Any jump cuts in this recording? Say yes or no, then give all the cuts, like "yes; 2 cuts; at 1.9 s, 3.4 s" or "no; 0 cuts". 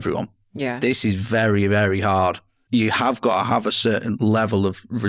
yes; 2 cuts; at 2.5 s, 4.2 s